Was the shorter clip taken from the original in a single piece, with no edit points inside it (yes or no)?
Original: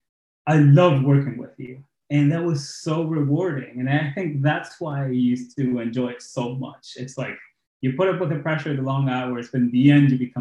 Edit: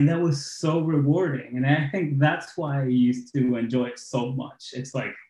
yes